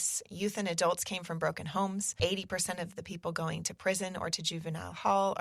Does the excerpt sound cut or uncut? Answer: cut